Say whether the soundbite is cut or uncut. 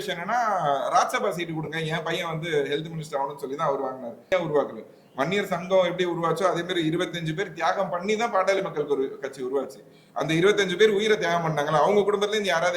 cut